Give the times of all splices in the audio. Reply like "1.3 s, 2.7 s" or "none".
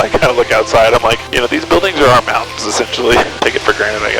1.3 s, 3.3 s